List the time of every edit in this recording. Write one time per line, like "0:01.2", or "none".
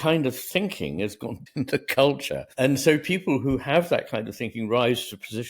0:01.4
0:02.4